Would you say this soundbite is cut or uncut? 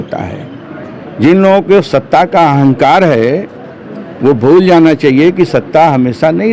uncut